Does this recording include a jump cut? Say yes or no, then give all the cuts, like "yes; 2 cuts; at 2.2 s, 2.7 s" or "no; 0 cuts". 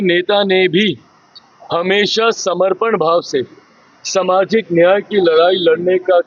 no; 0 cuts